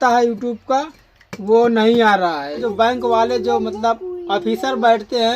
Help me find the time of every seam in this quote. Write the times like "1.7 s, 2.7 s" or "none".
2.6 s